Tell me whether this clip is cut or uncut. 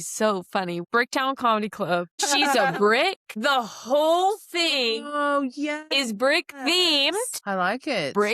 cut